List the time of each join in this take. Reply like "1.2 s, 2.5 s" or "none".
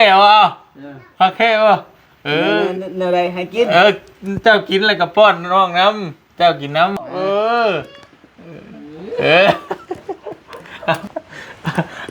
7.1 s, 11.1 s